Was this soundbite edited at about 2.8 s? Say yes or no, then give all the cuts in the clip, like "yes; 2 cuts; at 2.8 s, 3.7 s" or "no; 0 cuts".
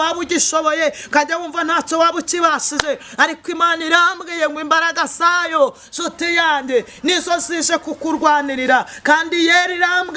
no; 0 cuts